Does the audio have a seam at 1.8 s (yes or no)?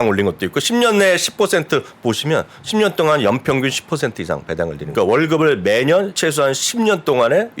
no